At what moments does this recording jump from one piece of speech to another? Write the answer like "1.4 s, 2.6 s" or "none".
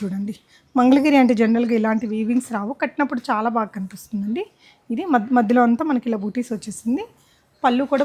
none